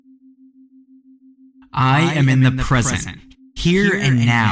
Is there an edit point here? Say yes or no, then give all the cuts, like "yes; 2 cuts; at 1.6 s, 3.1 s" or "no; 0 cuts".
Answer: no; 0 cuts